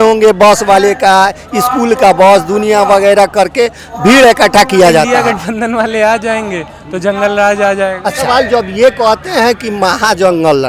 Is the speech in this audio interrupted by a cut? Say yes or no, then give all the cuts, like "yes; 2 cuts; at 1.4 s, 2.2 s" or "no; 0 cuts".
yes; 2 cuts; at 5.2 s, 8.2 s